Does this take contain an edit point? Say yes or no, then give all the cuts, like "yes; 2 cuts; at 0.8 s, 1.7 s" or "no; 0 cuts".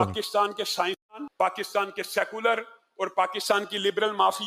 yes; 1 cut; at 1.2 s